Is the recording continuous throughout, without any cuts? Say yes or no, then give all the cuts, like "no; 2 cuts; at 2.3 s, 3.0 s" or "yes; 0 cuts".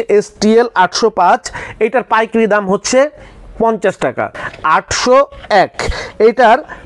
no; 1 cut; at 4.3 s